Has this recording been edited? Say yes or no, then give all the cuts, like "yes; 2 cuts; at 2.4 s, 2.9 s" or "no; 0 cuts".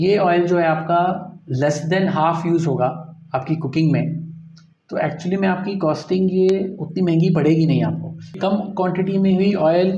yes; 1 cut; at 8.4 s